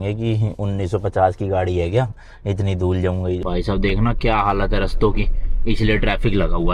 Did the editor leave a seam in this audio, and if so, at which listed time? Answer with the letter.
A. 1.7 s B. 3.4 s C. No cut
B